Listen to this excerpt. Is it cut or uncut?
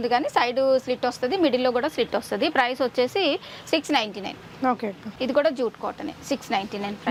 uncut